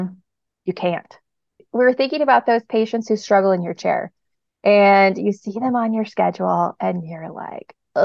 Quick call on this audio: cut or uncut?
cut